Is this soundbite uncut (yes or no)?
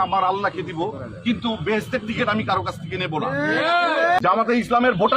no